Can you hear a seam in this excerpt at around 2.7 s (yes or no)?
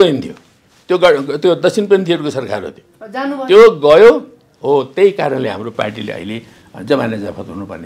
no